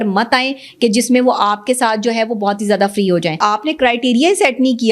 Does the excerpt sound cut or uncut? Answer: cut